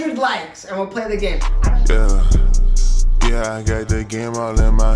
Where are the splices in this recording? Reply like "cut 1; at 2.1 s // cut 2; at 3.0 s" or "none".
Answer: cut 1; at 1.5 s